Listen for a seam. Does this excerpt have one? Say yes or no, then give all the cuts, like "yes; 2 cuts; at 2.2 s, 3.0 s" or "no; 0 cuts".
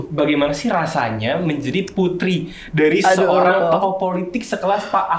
no; 0 cuts